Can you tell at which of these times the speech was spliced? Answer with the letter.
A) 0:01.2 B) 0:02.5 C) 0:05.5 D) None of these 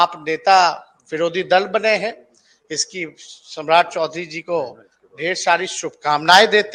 D